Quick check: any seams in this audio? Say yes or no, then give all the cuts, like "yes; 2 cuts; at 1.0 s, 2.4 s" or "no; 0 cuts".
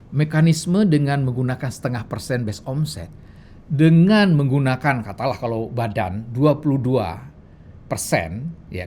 no; 0 cuts